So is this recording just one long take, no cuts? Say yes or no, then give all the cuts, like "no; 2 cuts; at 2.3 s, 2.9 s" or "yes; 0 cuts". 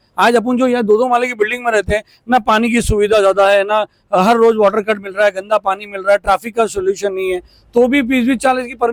yes; 0 cuts